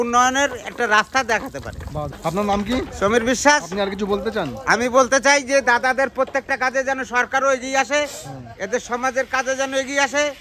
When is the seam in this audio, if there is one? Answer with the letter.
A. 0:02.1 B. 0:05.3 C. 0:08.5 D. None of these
A